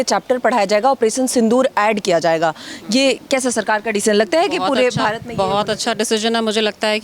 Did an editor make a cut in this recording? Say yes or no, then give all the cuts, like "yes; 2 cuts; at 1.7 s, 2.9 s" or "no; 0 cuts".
no; 0 cuts